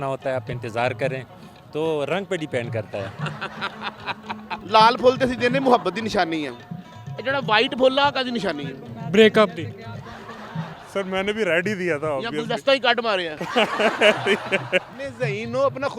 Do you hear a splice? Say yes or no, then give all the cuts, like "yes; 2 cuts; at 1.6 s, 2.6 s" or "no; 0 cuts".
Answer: yes; 3 cuts; at 4.5 s, 10.7 s, 14.9 s